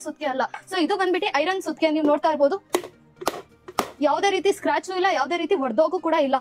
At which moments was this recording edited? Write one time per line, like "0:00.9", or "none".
none